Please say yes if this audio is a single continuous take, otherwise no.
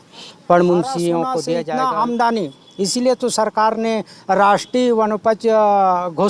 no